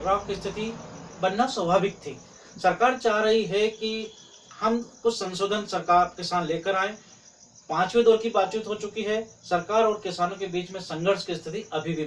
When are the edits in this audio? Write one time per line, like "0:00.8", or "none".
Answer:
none